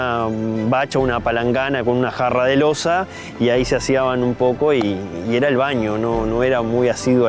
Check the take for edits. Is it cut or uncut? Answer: uncut